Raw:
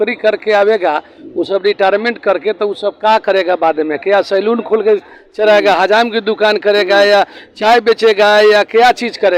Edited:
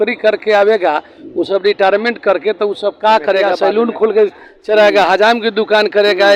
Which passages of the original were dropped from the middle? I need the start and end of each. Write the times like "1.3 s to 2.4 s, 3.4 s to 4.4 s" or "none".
3.5 s to 4.2 s